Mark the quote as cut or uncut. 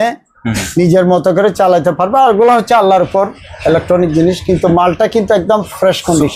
uncut